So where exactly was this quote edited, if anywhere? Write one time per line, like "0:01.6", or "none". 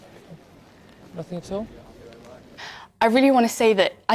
0:02.6